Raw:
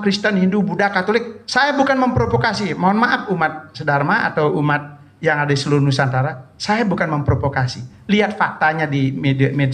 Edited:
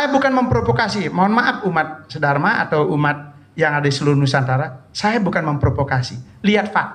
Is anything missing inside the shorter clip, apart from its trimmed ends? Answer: no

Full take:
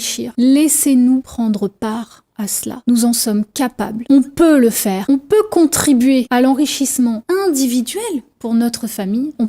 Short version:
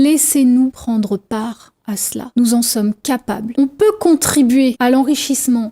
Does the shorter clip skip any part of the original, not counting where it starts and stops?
yes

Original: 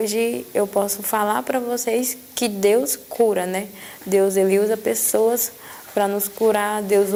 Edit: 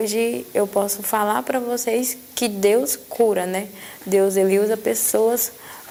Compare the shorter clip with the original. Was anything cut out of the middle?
no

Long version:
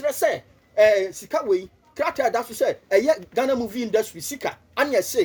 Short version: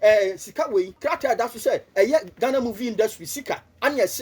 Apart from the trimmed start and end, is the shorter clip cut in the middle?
yes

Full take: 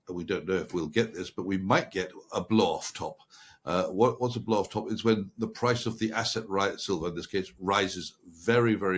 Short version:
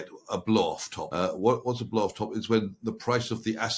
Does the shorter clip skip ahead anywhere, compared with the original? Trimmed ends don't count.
yes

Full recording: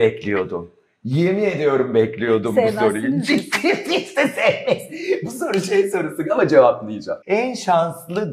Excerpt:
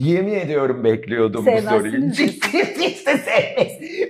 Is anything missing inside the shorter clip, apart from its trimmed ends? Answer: no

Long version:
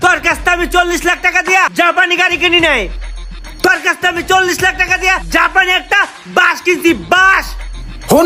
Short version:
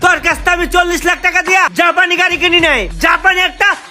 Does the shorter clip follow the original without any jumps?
no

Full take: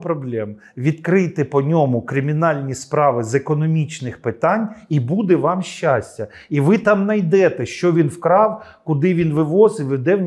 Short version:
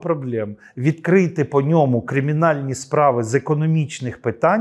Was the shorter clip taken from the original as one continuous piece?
yes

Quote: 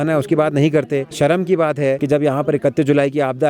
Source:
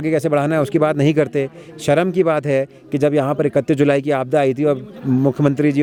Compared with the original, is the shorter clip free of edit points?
no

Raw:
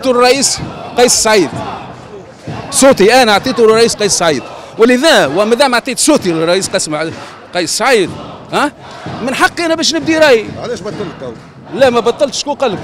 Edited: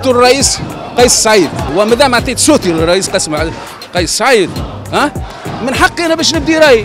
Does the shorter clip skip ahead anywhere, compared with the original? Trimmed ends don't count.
yes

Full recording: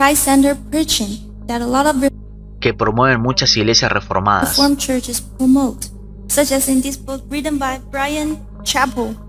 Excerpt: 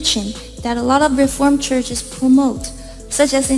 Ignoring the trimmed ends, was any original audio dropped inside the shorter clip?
yes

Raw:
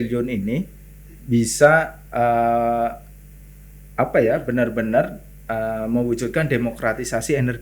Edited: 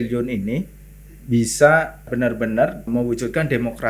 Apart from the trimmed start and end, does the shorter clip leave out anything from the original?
yes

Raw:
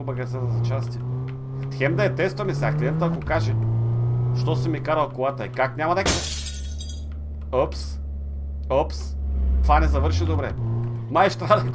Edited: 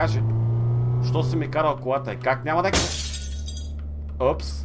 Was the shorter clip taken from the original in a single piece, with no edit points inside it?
yes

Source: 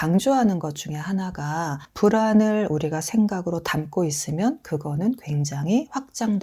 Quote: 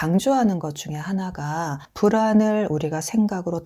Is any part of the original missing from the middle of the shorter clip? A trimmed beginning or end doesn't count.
no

